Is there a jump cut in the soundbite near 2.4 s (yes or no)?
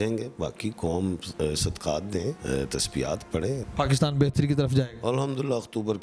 yes